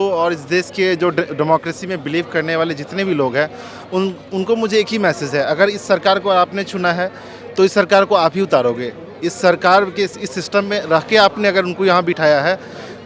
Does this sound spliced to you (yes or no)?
no